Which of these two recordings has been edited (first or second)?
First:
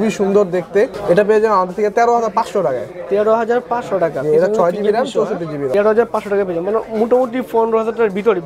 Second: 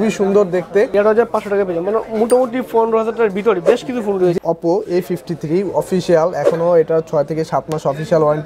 second